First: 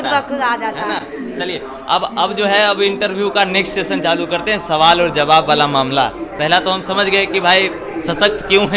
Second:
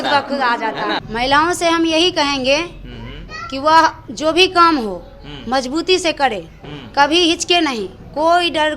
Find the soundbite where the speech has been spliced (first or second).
second